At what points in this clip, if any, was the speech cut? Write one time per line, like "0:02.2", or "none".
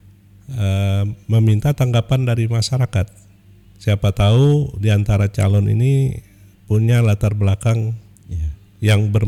none